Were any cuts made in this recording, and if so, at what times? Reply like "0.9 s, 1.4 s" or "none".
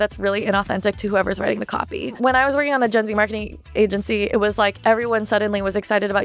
2.2 s

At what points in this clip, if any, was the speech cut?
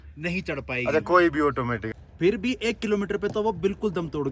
1.9 s

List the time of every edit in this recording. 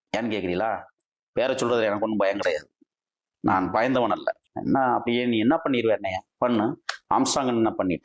4.5 s

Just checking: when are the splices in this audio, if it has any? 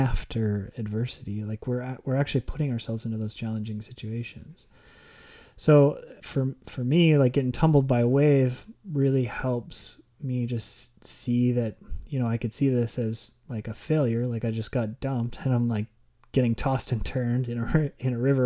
6.1 s

